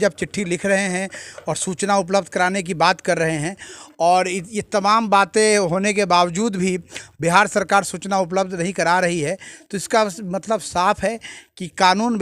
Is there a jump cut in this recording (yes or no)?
no